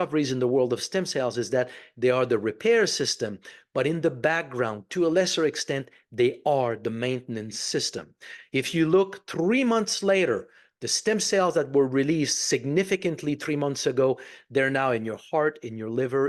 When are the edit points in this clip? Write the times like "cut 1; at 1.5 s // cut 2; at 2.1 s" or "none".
none